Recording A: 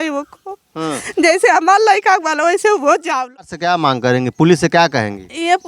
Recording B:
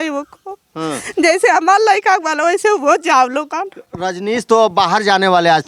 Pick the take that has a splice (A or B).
A